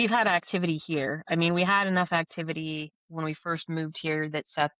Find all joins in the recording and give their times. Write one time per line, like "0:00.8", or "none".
none